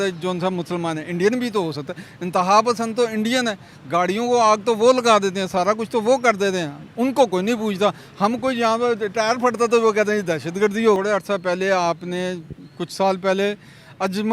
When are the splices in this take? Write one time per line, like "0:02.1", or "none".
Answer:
0:11.0

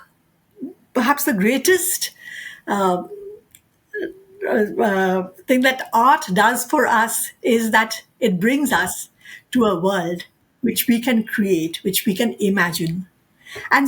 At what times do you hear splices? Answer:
none

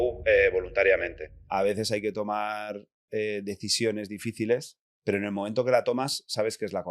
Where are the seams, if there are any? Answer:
0:01.4
0:04.9

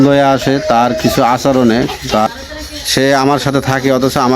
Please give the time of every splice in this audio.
0:02.3

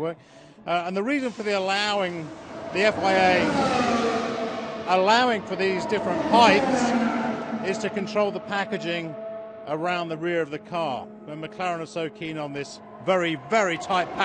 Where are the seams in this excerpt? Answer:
0:03.9

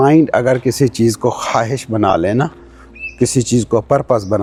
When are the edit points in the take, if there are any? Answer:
none

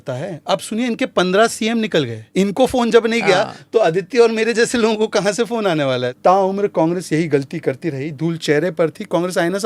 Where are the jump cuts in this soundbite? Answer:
0:02.2
0:06.1

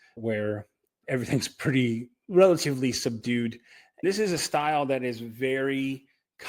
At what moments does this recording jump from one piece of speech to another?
0:04.0

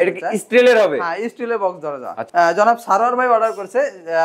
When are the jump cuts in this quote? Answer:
0:02.2

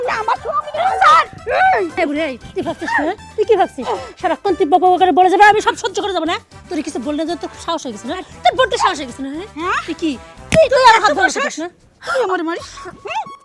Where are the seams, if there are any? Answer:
0:01.9

